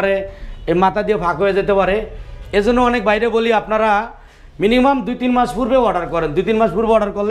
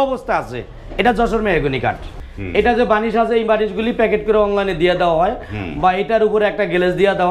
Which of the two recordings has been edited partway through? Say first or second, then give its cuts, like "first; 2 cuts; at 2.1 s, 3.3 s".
second; 1 cut; at 2.1 s